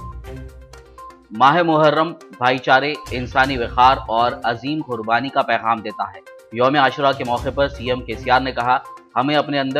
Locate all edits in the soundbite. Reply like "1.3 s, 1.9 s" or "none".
1.2 s